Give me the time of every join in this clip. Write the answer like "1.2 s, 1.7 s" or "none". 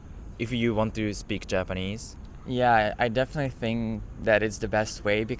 none